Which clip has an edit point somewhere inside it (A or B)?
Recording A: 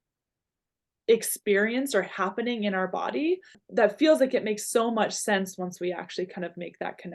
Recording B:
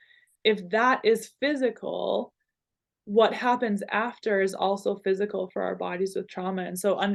A